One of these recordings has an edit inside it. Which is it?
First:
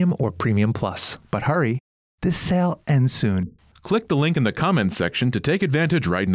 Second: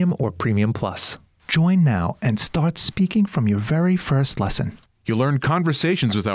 first; 1 cut; at 1.1 s

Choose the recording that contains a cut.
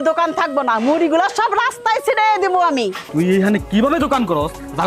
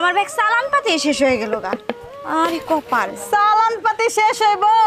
first; 1 cut; at 3.0 s

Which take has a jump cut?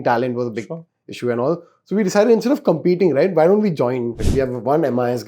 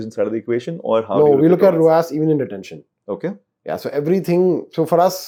first; 1 cut; at 4.2 s

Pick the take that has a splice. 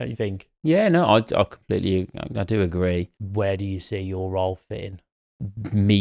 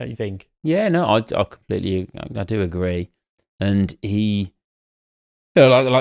first; 1 cut; at 3.2 s

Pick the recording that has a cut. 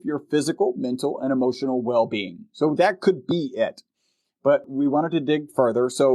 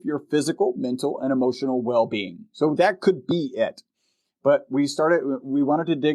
first; 1 cut; at 4.7 s

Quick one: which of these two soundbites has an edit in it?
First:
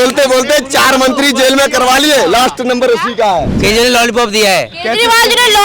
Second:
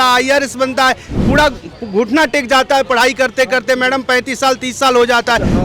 first; 1 cut; at 3.5 s

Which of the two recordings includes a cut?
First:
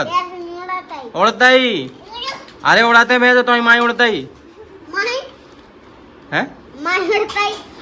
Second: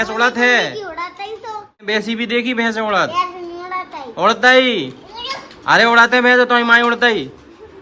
second; 1 cut; at 1.8 s

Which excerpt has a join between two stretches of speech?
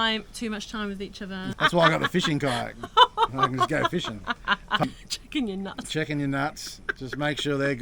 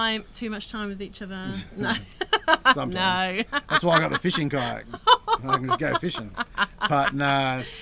first; 2 cuts; at 1.5 s, 4.8 s

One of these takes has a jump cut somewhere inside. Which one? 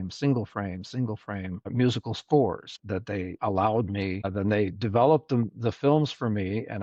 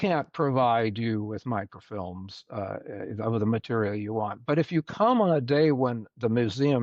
first; 3 cuts; at 1.7 s, 3.1 s, 4.3 s

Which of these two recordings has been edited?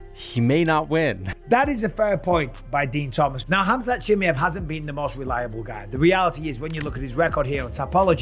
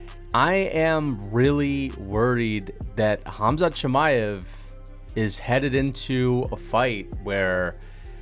first; 1 cut; at 1.4 s

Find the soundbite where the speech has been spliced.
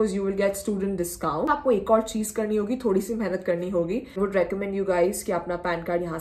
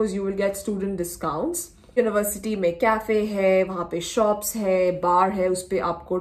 first; 2 cuts; at 1.5 s, 4.4 s

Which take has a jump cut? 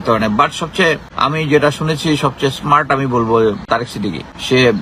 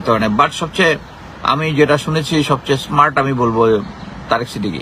first; 2 cuts; at 1.1 s, 3.9 s

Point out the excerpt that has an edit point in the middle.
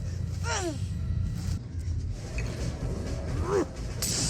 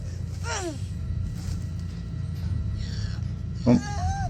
first; 1 cut; at 1.6 s

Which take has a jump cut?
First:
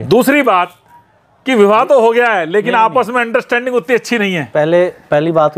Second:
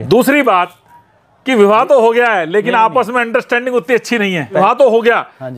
second; 1 cut; at 4.6 s

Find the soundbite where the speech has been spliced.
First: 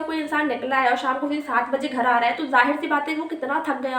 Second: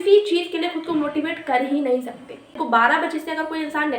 second; 1 cut; at 2.5 s

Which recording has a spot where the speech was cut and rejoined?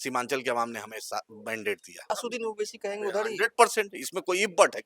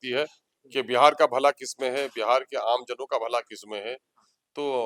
first; 1 cut; at 2.1 s

